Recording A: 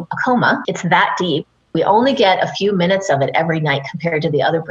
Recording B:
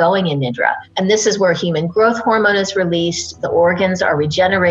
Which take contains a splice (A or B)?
A